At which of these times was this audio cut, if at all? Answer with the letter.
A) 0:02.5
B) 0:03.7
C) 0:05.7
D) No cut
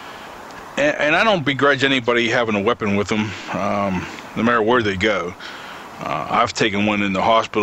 B